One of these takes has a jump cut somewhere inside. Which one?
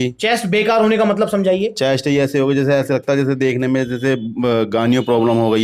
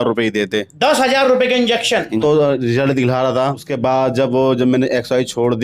second; 2 cuts; at 2.2 s, 3.6 s

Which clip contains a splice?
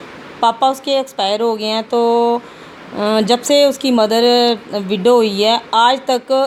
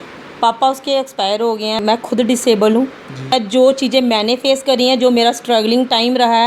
second; 2 cuts; at 1.8 s, 3.3 s

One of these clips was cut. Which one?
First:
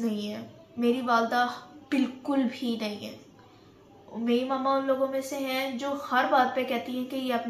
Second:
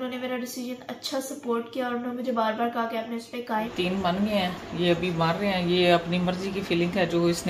second; 1 cut; at 3.7 s

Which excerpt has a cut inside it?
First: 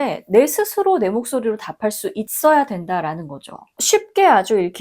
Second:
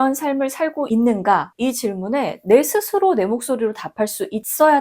first; 1 cut; at 3.8 s

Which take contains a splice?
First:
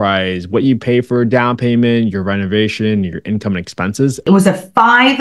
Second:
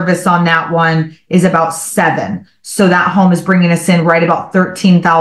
first; 1 cut; at 4.2 s

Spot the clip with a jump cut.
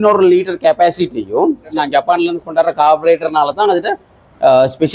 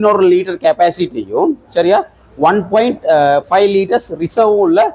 first; 1 cut; at 1.6 s

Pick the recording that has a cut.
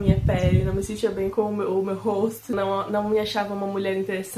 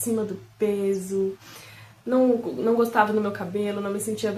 first; 1 cut; at 2.5 s

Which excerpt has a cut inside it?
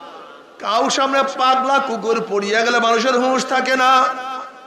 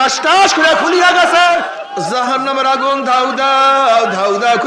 second; 1 cut; at 1.7 s

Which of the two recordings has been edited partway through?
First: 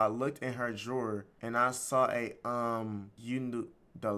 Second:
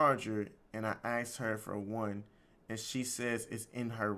first; 2 cuts; at 1.3 s, 3.1 s

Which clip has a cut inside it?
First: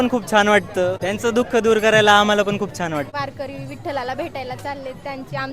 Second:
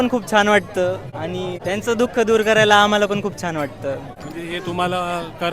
first; 2 cuts; at 1.0 s, 3.1 s

